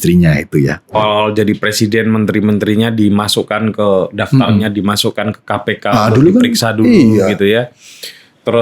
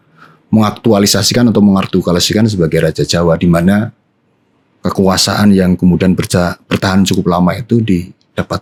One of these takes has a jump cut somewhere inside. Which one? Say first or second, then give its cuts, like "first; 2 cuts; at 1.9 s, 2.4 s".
first; 1 cut; at 1.0 s